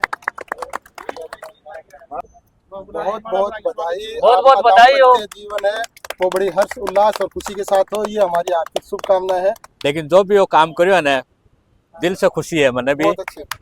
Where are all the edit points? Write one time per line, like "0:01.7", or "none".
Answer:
0:02.2
0:09.7